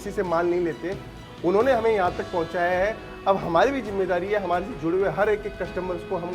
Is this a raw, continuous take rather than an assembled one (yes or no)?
yes